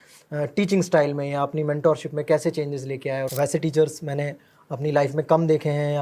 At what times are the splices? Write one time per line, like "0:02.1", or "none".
0:03.3